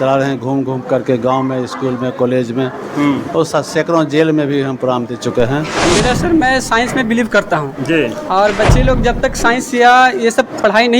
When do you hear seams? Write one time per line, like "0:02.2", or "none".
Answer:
0:05.9